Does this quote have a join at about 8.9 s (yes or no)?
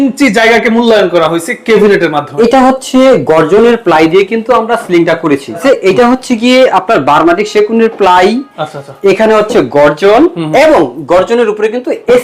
no